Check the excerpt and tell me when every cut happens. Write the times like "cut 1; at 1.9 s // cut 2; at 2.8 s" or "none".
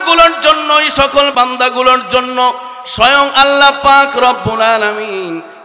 cut 1; at 1.3 s